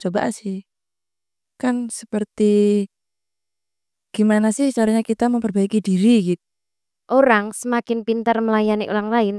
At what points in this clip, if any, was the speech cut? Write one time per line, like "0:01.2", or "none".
0:06.2